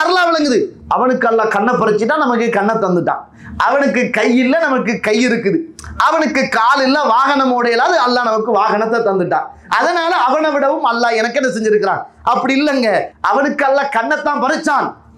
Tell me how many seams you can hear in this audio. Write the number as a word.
zero